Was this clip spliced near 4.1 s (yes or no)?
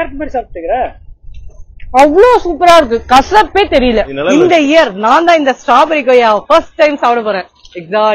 yes